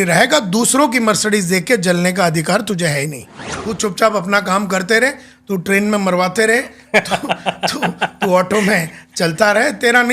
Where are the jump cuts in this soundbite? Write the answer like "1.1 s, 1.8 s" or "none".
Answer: 3.5 s

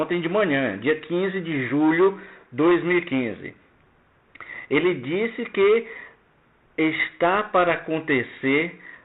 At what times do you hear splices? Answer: none

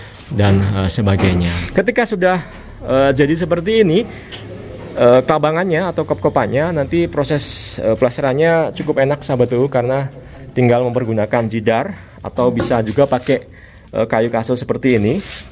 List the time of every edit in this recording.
1.6 s

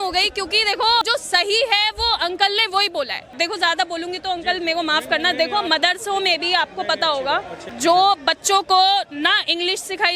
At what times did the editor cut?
1.0 s, 3.3 s, 7.7 s

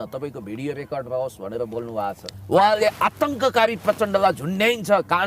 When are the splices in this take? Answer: 2.2 s

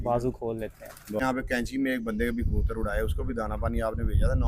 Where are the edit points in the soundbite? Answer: 1.2 s

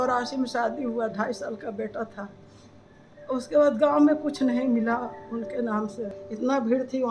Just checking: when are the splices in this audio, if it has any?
6.2 s

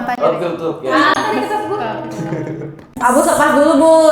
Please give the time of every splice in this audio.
2.8 s

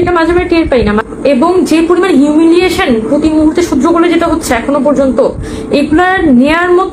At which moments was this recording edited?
1.0 s

